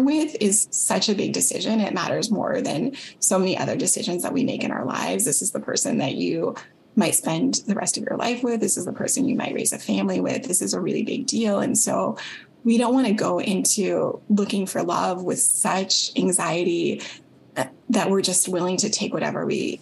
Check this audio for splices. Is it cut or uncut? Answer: uncut